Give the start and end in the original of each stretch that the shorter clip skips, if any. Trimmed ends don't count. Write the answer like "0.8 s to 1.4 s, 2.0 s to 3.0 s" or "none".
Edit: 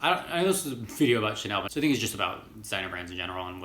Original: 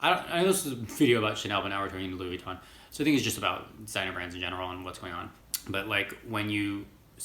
1.7 s to 2.9 s